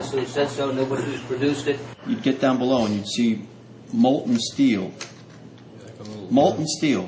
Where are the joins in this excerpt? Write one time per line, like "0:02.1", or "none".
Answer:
0:05.6